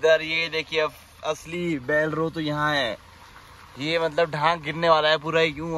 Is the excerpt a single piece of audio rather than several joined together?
yes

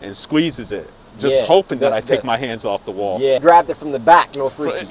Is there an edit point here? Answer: yes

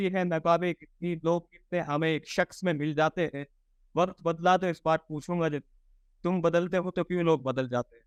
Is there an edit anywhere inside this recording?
no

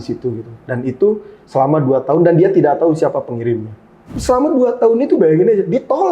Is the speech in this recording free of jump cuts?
no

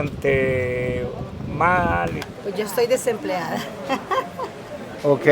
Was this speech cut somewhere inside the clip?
yes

